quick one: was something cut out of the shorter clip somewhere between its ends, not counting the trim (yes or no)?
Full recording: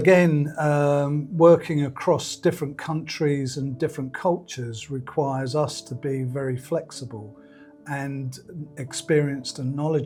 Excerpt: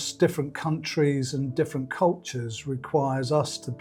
no